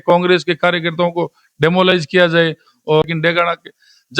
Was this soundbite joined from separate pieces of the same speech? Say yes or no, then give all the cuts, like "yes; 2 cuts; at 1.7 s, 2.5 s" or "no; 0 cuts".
yes; 1 cut; at 3.0 s